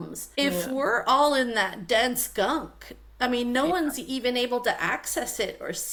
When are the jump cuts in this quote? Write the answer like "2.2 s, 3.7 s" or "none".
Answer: none